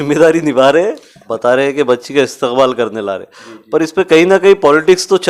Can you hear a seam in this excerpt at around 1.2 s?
yes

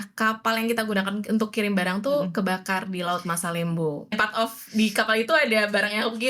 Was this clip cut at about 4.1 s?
yes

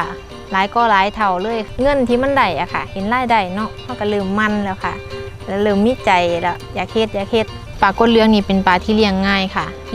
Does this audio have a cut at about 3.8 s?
no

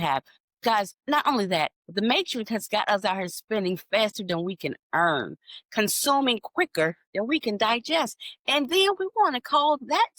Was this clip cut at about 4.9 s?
no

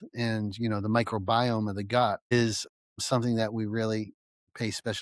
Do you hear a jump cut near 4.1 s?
no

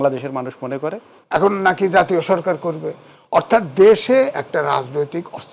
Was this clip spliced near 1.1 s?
yes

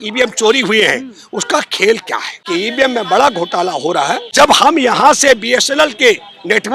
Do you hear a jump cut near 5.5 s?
no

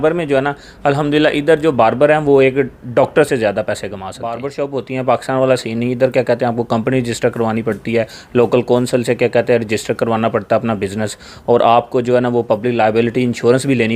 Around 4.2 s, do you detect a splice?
yes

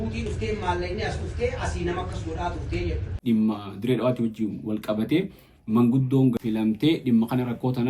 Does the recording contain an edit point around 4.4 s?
no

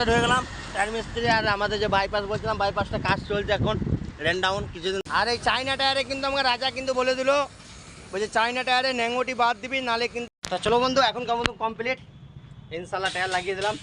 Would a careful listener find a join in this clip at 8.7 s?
no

